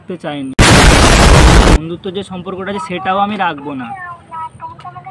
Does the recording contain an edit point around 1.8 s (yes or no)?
yes